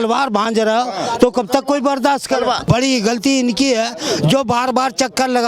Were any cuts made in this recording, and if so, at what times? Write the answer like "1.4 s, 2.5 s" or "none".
2.6 s